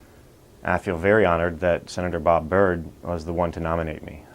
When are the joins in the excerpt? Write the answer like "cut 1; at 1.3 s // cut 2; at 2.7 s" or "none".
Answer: cut 1; at 1.7 s